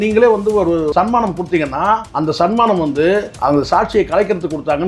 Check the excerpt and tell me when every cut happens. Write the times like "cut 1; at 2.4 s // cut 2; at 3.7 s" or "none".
cut 1; at 0.9 s // cut 2; at 2.1 s // cut 3; at 3.3 s